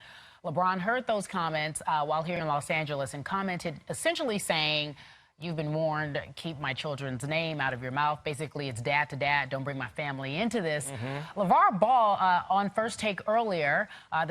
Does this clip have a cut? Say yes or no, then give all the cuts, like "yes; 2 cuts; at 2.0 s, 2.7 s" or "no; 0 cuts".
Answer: no; 0 cuts